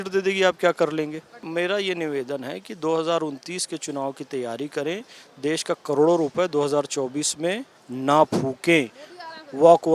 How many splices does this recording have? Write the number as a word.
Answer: one